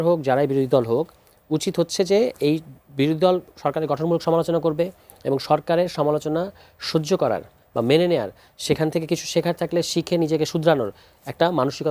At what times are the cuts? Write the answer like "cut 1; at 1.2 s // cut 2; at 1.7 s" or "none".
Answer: none